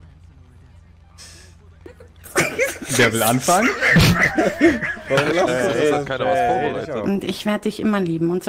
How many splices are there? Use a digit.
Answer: 1